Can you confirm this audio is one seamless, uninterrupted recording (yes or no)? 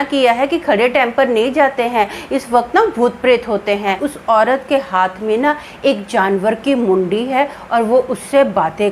no